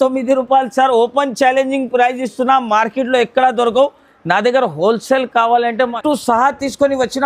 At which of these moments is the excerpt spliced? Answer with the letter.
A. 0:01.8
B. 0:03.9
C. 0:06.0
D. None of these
C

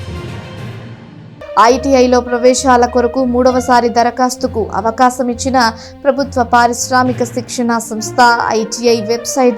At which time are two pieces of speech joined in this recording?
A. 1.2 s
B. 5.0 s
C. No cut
A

